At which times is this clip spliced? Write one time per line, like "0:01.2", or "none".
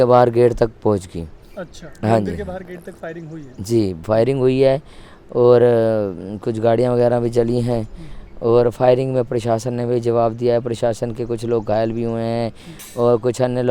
none